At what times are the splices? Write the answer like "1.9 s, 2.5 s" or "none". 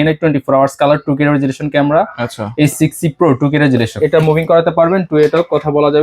3.9 s